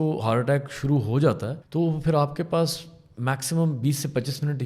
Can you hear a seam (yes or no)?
yes